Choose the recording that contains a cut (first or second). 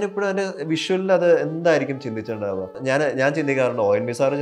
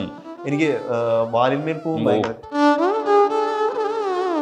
first